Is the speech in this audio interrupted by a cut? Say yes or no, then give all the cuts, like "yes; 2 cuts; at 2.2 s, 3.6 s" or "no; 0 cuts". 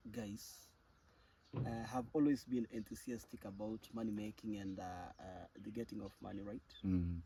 no; 0 cuts